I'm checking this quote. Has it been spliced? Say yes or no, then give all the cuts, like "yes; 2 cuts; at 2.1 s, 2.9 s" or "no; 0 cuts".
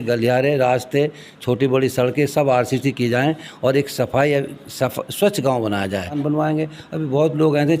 yes; 1 cut; at 6.2 s